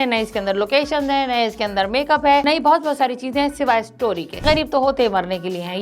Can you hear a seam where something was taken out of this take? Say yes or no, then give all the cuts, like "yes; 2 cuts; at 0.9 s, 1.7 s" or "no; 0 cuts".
yes; 2 cuts; at 2.4 s, 4.4 s